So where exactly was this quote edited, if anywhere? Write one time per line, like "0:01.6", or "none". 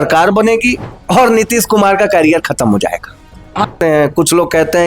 0:00.9
0:03.7